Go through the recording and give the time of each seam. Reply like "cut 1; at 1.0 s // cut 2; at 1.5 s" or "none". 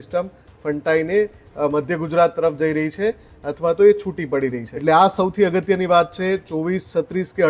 cut 1; at 4.7 s